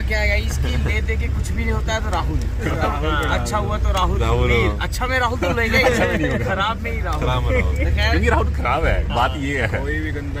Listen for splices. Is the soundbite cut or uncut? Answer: uncut